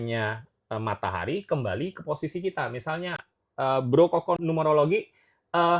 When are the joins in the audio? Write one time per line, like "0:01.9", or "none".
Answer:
0:04.4